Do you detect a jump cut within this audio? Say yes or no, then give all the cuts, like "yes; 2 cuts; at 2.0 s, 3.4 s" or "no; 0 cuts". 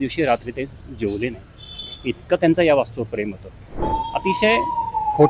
yes; 1 cut; at 3.8 s